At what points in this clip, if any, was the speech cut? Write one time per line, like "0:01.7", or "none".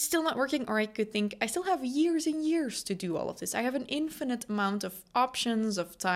none